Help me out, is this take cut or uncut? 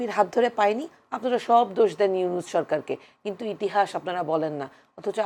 uncut